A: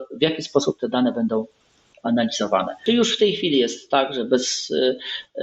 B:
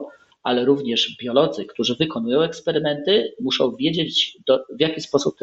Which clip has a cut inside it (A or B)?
A